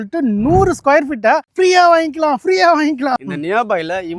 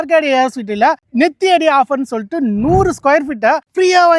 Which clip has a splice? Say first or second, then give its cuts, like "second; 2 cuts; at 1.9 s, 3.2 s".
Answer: first; 1 cut; at 3.2 s